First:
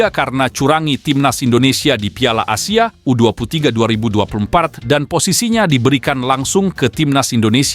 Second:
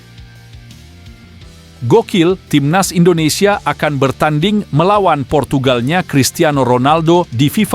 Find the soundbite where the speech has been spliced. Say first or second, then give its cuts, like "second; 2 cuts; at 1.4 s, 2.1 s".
second; 1 cut; at 1.0 s